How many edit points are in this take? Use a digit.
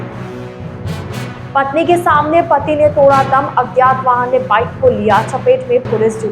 1